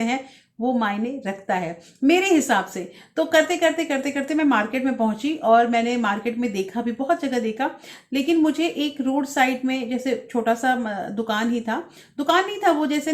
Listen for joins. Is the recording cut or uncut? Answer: uncut